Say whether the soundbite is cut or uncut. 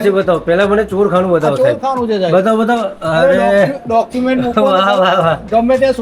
uncut